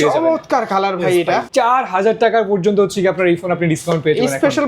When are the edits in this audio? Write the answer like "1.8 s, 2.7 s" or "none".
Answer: 1.5 s